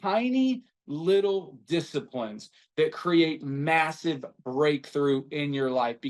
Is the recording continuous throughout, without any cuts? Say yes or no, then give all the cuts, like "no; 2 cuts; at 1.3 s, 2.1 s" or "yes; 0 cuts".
no; 1 cut; at 2.6 s